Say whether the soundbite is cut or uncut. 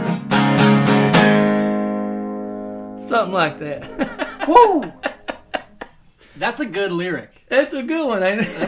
uncut